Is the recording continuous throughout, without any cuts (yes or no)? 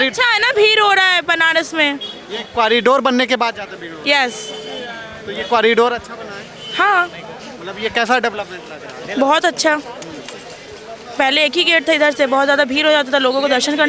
yes